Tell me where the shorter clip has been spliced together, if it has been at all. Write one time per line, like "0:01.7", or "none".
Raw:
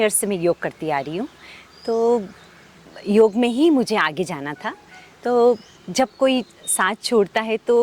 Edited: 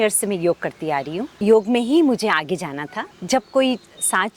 0:01.2
0:03.1